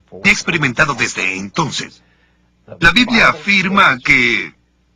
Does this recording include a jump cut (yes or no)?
yes